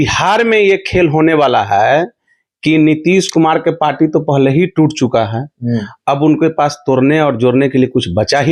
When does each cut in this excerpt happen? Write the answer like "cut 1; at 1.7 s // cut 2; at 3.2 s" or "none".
none